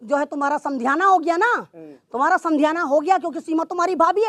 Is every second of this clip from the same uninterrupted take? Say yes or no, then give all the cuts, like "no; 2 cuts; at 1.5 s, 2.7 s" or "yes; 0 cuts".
yes; 0 cuts